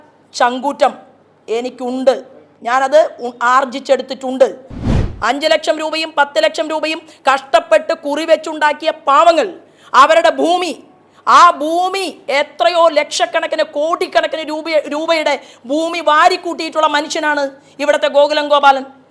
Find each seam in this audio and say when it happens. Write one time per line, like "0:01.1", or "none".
0:04.9

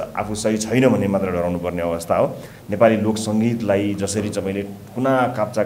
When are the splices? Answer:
0:02.6

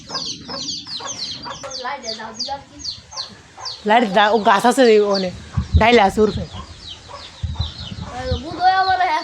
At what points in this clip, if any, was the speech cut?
0:01.7

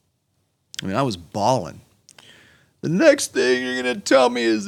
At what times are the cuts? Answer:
none

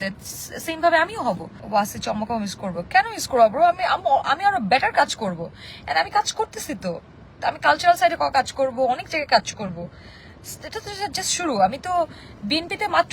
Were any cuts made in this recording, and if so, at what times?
0:01.5

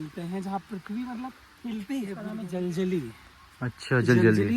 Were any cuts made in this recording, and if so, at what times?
0:02.2

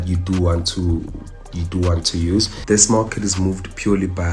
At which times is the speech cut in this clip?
0:02.6

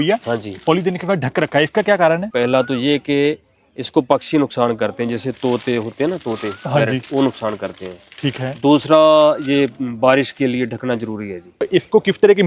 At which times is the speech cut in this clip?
0:02.3
0:11.7

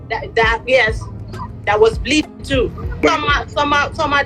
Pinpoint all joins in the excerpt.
0:03.0

